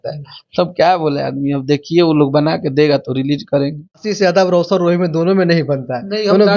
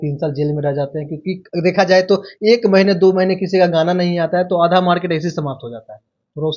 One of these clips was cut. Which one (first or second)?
first